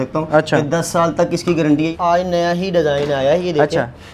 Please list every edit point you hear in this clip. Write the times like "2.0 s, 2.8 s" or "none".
1.9 s